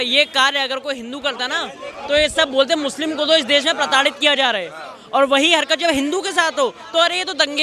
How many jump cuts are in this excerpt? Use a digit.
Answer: 0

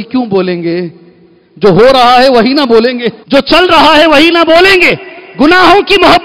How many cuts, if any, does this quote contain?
1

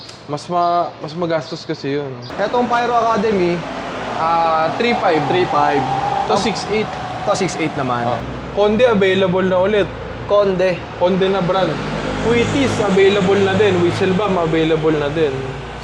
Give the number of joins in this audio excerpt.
2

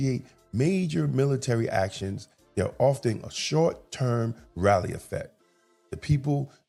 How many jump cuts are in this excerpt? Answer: 0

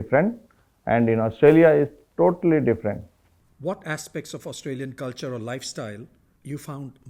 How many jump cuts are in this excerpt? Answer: 0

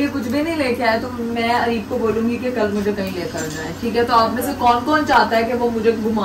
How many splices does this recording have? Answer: 0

